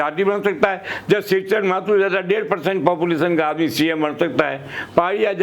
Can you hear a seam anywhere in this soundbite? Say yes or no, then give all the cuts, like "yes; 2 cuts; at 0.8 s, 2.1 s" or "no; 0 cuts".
no; 0 cuts